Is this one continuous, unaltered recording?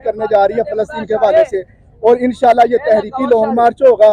yes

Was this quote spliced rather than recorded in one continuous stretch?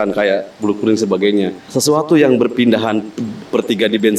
yes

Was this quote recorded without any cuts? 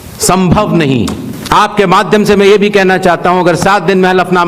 no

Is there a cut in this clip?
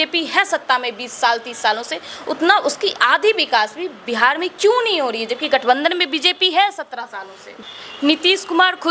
yes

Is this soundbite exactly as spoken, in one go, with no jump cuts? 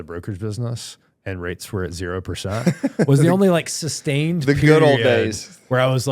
yes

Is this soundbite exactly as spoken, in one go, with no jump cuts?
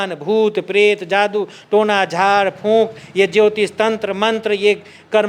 yes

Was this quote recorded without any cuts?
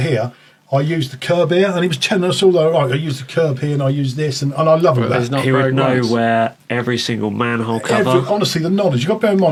yes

